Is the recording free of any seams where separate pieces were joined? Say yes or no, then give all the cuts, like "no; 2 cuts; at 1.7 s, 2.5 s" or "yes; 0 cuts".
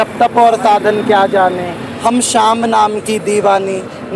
yes; 0 cuts